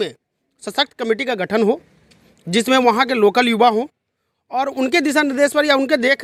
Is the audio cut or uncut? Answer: uncut